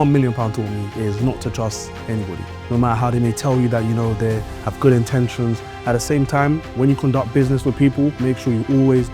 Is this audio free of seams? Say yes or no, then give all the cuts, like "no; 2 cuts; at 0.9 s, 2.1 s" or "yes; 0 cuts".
yes; 0 cuts